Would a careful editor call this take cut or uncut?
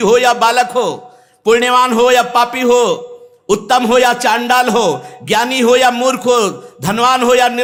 uncut